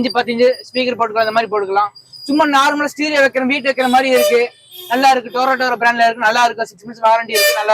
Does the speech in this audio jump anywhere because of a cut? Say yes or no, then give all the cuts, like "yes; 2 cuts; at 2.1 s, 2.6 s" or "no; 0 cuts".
no; 0 cuts